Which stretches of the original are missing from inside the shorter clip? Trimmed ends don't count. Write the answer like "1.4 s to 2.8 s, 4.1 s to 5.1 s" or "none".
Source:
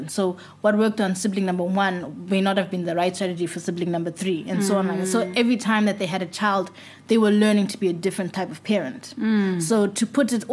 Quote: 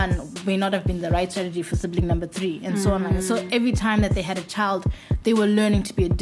none